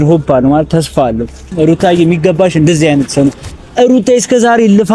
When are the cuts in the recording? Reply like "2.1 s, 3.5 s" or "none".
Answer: 1.5 s